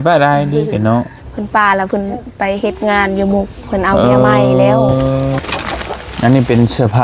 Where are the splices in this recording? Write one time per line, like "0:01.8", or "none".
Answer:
0:05.4